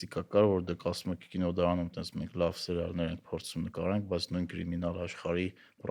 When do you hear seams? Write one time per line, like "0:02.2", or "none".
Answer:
none